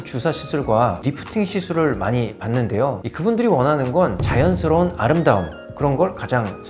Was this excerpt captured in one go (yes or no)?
no